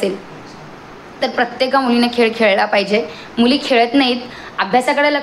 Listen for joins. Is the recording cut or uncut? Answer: uncut